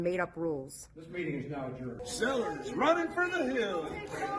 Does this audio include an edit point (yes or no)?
yes